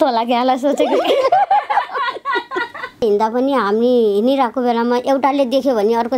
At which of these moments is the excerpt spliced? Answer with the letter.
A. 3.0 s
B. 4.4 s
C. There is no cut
A